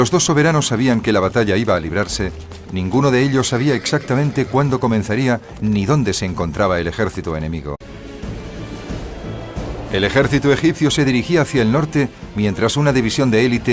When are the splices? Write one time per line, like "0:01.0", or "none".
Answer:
none